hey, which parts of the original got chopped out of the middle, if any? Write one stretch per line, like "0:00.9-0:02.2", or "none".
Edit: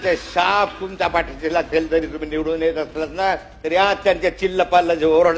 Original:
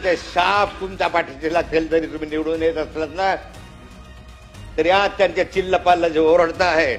0:03.5-0:04.7